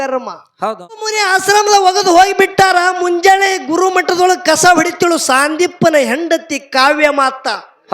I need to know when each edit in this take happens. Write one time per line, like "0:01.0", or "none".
0:01.2